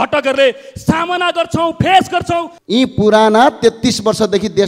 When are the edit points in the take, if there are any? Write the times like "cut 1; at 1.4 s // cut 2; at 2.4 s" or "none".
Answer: cut 1; at 2.5 s